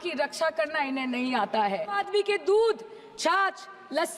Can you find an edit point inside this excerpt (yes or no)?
yes